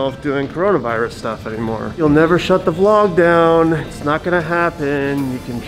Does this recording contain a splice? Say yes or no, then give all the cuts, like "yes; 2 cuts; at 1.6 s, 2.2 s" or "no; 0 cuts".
yes; 1 cut; at 2.0 s